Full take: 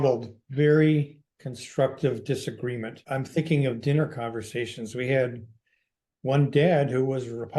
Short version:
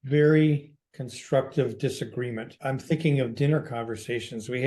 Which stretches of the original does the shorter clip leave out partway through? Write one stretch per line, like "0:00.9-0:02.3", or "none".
none

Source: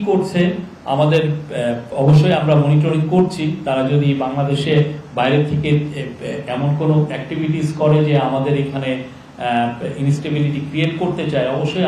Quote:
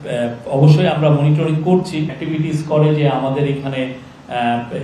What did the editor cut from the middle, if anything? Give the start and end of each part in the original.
0:03.6-0:07.2

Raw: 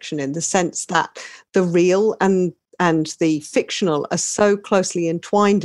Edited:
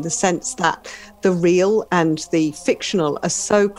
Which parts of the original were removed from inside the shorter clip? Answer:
0:02.2-0:02.7

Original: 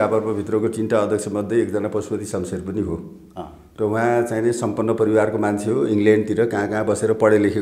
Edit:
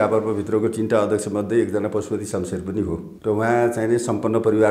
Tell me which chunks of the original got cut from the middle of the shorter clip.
0:03.1-0:03.6

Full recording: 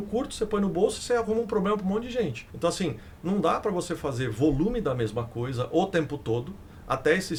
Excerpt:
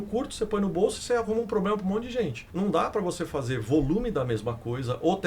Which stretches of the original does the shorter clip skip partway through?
0:02.4-0:03.1

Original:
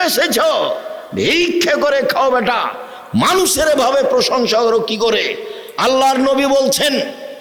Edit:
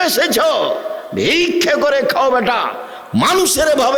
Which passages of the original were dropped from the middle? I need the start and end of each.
none

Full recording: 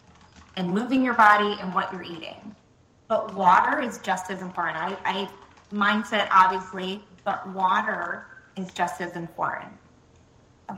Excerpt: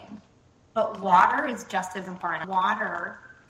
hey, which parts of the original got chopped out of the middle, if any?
0:04.8-0:07.5

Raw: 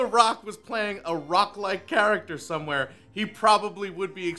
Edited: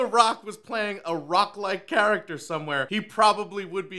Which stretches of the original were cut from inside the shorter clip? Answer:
0:02.9-0:03.1

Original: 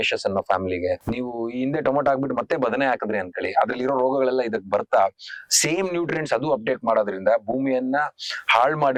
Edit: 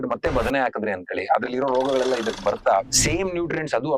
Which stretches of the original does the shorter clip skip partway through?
0:05.2-0:05.5

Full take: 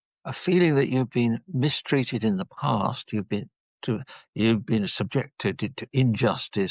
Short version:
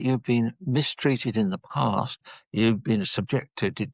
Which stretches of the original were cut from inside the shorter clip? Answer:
0:03.1-0:04.0

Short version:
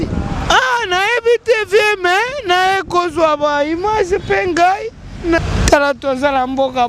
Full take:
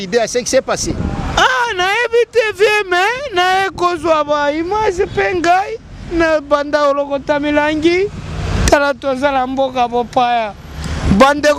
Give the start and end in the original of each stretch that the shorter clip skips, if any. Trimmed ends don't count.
0:06.3-0:08.4

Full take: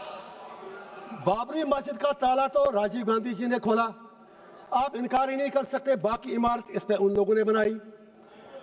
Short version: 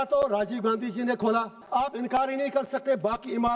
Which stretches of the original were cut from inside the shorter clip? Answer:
0:04.0-0:04.6

